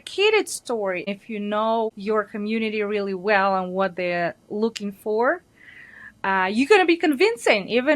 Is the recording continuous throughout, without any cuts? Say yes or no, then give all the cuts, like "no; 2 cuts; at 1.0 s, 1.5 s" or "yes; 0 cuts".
no; 2 cuts; at 1.0 s, 2.0 s